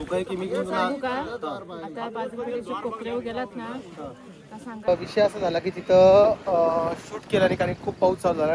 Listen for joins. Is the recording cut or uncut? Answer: cut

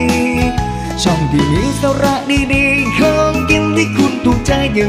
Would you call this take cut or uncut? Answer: uncut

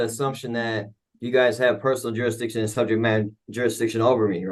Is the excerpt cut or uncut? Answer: uncut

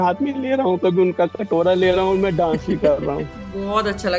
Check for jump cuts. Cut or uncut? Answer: uncut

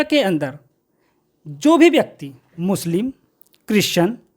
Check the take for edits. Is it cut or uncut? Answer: uncut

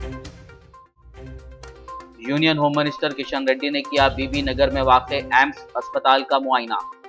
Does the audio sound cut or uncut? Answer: uncut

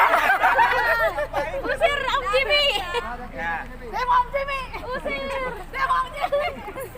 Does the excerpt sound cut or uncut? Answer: uncut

